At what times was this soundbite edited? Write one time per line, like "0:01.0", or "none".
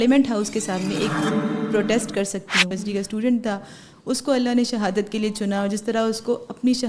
0:02.8

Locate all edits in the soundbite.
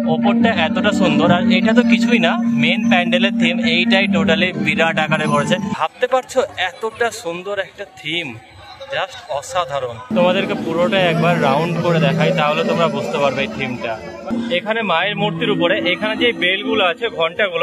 0:05.7
0:10.0
0:14.4

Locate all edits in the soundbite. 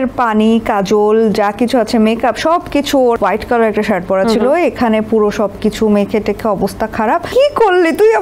0:03.2
0:07.3

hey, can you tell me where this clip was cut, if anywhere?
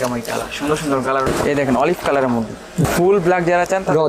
0:01.2
0:02.8

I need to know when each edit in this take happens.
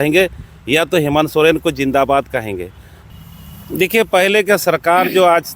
0:03.0

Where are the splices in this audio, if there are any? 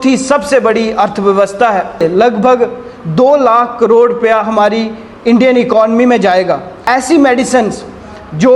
0:02.0
0:06.8

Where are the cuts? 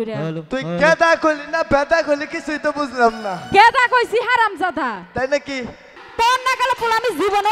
0:05.9

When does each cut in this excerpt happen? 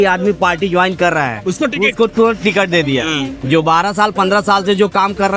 none

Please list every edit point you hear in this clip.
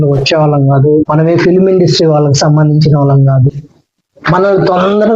0:01.1

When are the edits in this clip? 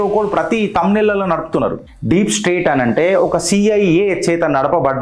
0:01.9

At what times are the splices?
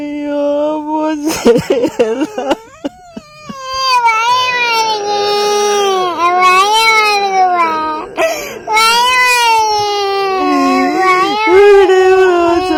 none

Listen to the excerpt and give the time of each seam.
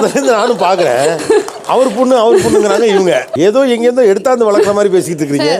none

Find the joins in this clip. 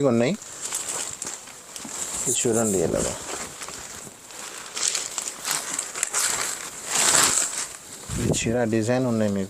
none

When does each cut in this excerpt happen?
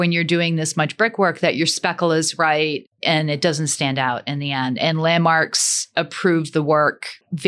none

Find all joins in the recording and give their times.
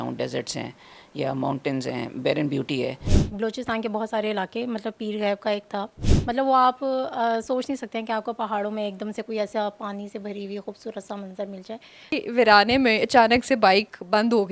0:03.1
0:06.1
0:12.2

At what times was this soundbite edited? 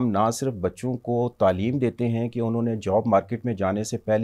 none

